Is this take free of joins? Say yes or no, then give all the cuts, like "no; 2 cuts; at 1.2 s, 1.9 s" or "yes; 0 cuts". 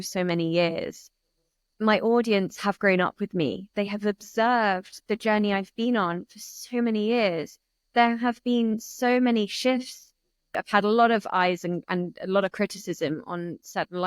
no; 2 cuts; at 3.7 s, 10.5 s